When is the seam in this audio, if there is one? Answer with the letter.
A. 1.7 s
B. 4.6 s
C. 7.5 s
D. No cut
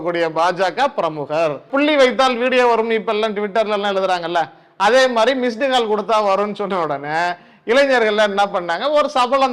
A